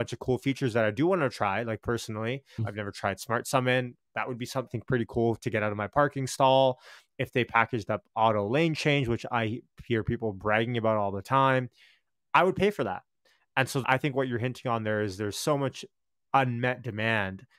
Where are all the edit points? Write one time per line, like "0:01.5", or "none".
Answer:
0:02.6
0:04.7
0:13.8